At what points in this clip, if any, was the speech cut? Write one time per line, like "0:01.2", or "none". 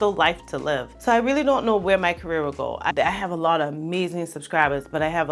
0:00.9
0:02.9